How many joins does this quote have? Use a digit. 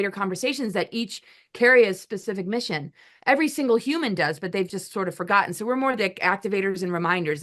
0